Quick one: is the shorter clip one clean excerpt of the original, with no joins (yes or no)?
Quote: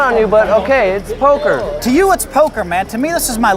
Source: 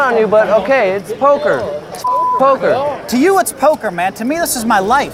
no